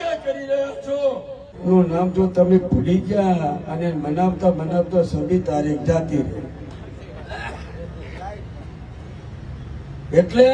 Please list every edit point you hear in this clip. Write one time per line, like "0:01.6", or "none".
0:01.5